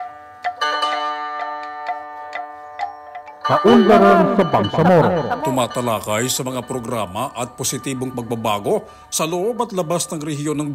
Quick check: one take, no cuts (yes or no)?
no